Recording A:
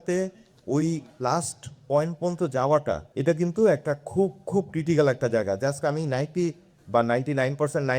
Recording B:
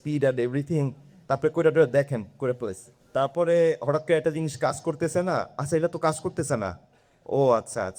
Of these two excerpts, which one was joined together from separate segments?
A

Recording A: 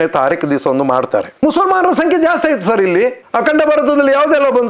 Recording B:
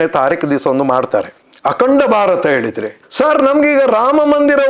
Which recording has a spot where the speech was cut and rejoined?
A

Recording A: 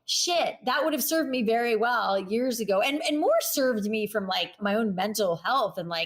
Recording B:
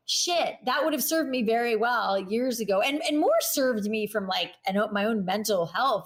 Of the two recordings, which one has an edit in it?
A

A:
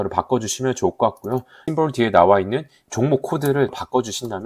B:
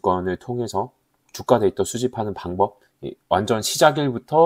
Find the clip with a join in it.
A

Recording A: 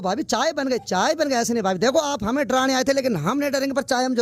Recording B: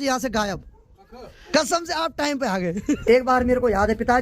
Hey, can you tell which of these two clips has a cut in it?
B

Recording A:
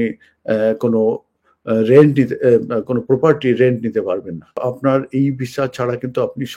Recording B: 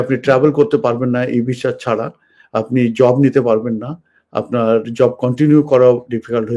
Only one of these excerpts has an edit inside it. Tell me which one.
A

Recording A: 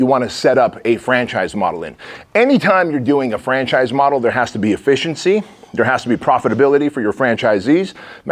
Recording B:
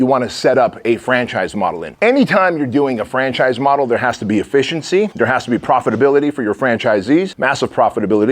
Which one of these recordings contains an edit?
B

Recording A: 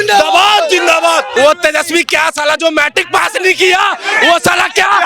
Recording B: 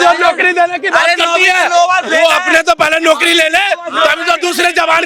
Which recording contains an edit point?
A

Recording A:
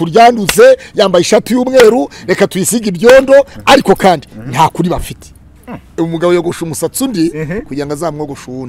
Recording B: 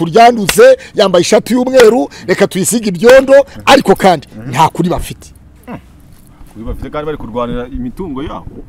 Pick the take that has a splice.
A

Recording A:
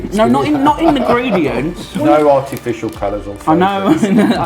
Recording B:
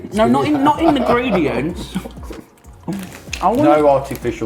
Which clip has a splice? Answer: A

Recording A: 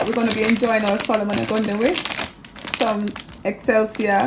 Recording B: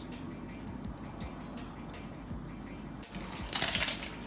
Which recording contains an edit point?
B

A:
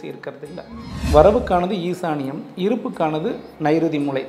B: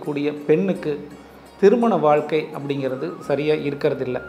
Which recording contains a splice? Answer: A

